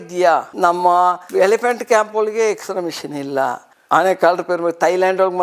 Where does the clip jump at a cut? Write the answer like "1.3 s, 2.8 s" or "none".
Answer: 3.7 s